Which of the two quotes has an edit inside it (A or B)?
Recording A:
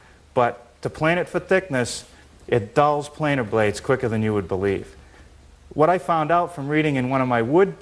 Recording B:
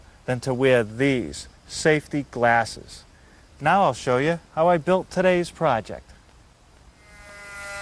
B